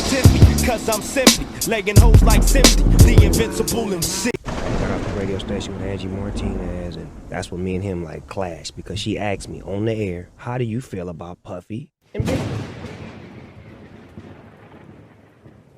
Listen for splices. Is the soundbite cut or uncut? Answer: cut